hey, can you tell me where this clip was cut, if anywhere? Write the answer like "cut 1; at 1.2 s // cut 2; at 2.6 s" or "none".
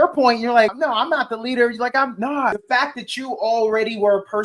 cut 1; at 0.7 s // cut 2; at 2.6 s